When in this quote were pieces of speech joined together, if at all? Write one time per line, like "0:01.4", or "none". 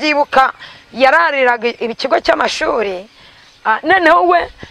none